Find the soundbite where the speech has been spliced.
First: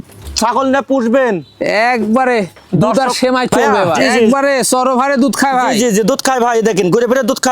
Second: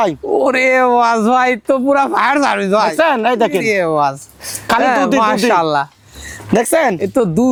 first; 1 cut; at 4.2 s

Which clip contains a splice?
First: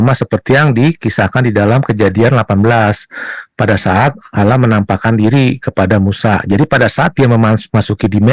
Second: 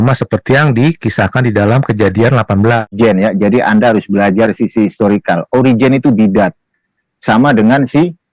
second; 1 cut; at 2.9 s

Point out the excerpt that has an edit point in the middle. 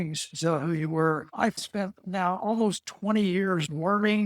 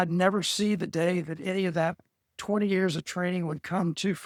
first; 1 cut; at 1.6 s

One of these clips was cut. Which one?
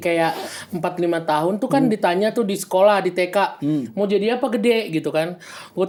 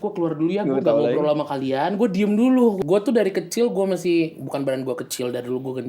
second; 1 cut; at 2.8 s

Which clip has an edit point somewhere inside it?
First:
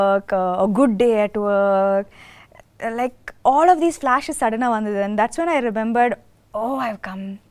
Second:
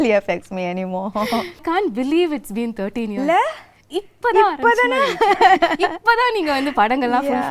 second; 1 cut; at 1.6 s

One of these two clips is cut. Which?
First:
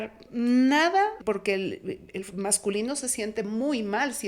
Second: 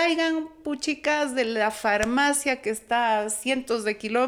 first; 1 cut; at 1.2 s

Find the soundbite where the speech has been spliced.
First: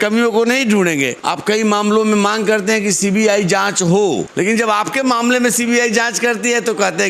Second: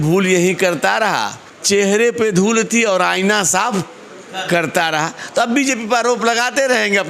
first; 2 cuts; at 1.2 s, 4.3 s

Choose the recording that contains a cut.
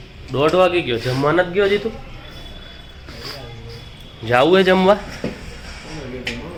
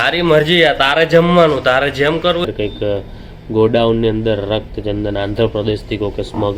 second; 1 cut; at 2.5 s

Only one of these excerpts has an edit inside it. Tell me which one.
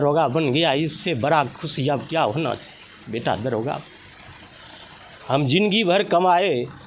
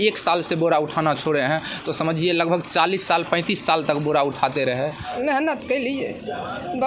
second; 1 cut; at 5.0 s

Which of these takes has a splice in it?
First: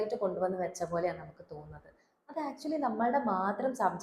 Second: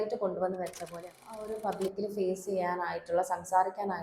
second; 1 cut; at 1.4 s

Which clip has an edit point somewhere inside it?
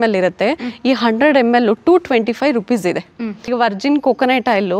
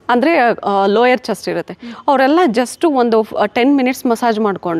first; 1 cut; at 3.2 s

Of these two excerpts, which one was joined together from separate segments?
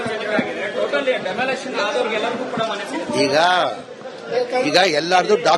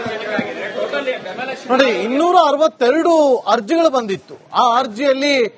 second; 1 cut; at 1.1 s

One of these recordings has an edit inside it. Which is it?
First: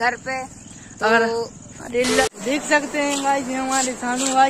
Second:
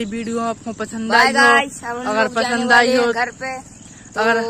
first; 1 cut; at 2.3 s

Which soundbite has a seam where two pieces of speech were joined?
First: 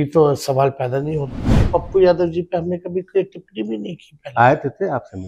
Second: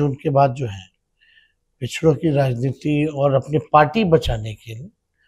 first; 1 cut; at 1.6 s

